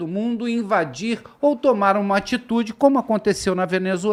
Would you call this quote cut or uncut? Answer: uncut